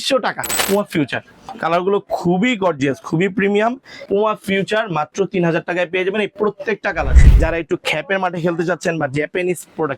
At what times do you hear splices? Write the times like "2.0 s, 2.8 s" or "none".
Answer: 0.9 s, 4.0 s, 7.2 s